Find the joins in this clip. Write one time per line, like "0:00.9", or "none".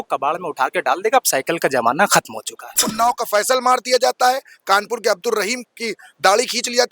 0:02.9